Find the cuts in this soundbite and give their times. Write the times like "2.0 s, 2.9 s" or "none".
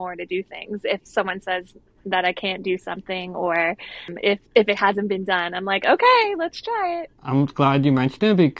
none